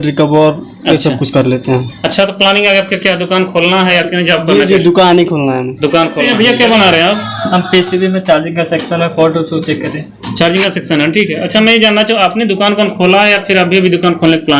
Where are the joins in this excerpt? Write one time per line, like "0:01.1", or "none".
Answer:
0:06.3